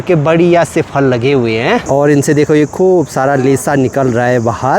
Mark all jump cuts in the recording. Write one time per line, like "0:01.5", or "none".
none